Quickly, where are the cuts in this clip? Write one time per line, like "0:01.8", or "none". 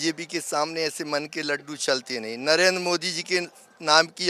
none